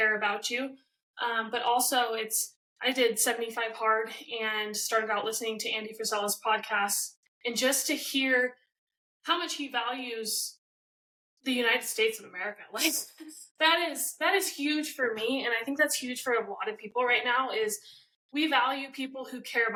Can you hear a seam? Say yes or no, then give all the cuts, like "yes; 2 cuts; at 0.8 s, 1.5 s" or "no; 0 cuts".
no; 0 cuts